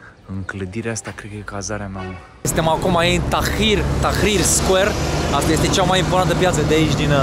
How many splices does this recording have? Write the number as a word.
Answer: one